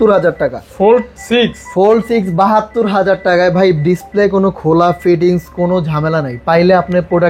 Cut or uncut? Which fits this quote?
uncut